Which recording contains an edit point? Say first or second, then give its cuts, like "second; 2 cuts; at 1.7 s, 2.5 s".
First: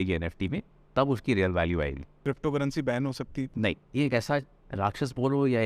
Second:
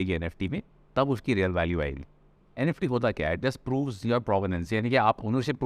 first; 2 cuts; at 2.1 s, 3.8 s